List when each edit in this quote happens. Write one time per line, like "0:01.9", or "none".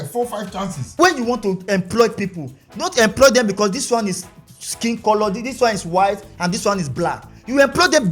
0:00.9